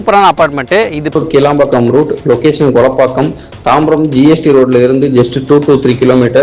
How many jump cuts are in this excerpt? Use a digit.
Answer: 1